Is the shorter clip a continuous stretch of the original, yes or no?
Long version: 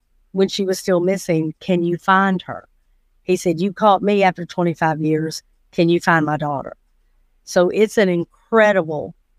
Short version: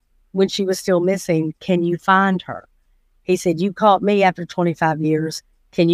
yes